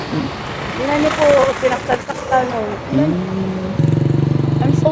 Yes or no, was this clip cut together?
yes